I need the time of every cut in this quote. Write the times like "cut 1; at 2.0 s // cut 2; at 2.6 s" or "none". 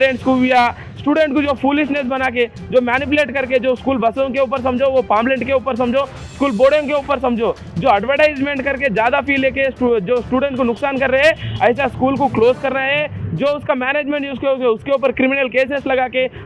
none